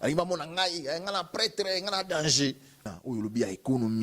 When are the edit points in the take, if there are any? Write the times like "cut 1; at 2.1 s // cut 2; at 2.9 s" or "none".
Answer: cut 1; at 2.8 s